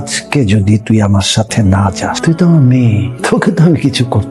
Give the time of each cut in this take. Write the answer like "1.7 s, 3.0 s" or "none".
2.2 s, 3.1 s